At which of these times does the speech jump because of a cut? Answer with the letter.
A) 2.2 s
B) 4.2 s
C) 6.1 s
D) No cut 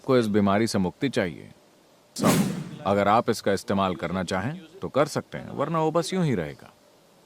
A